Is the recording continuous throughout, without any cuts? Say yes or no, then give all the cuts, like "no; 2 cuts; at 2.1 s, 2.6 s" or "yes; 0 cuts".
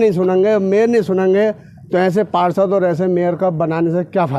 yes; 0 cuts